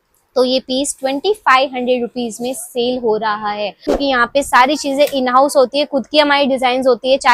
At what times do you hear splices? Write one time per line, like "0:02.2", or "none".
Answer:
0:03.9